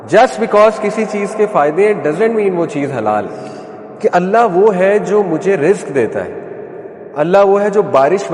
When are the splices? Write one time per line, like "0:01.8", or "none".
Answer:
0:03.3